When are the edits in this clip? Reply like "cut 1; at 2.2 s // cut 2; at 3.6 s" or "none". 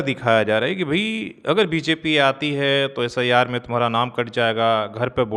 none